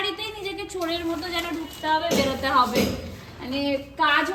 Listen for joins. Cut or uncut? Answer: uncut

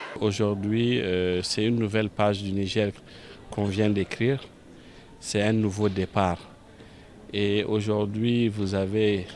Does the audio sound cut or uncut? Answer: uncut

